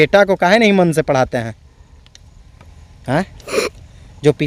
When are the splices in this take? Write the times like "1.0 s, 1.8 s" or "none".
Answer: none